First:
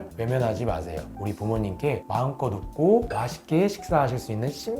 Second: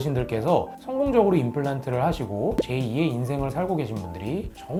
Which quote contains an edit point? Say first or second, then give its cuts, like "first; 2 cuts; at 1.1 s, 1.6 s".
first; 1 cut; at 1.2 s